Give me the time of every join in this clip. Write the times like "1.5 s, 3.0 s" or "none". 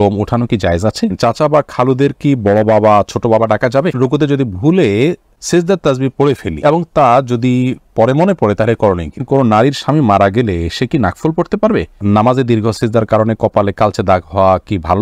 1.1 s, 4.0 s, 5.3 s, 6.5 s, 9.2 s, 12.0 s